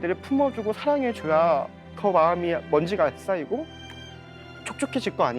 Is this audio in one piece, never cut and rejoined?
no; 1 cut; at 1.9 s

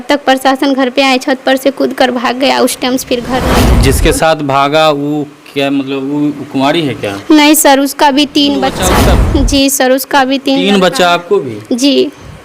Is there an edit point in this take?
yes; 2 cuts; at 3.7 s, 9.0 s

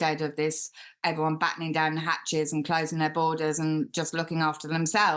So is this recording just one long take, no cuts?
no; 1 cut; at 1.0 s

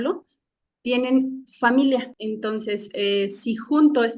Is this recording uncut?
no; 1 cut; at 2.1 s

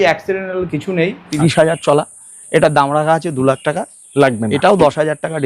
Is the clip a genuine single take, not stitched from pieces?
no; 1 cut; at 1.3 s

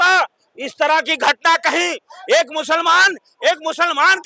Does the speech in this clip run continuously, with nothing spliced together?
yes; 0 cuts

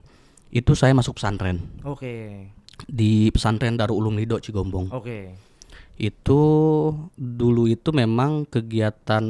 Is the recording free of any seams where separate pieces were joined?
yes; 0 cuts

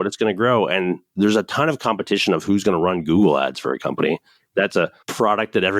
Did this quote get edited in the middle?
yes; 2 cuts; at 1.0 s, 4.9 s

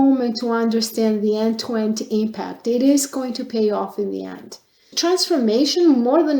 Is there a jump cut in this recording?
yes; 1 cut; at 4.9 s

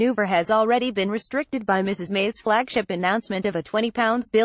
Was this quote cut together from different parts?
no; 0 cuts

